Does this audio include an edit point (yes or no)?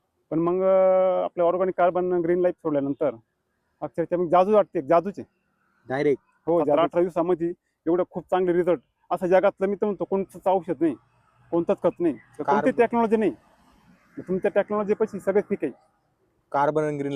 yes